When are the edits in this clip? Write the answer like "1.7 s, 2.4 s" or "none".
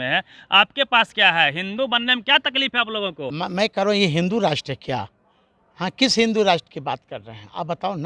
3.3 s